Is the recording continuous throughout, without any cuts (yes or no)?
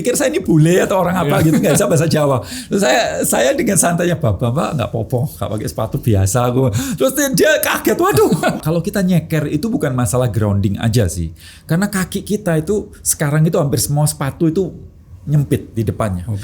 no